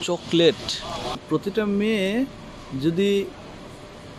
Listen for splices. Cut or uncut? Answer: cut